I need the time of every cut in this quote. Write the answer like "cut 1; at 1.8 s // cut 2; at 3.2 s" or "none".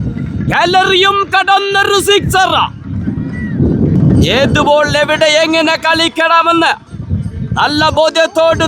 cut 1; at 4.0 s